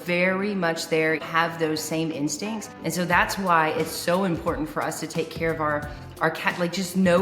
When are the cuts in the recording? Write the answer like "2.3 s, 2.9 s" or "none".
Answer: 1.2 s, 2.7 s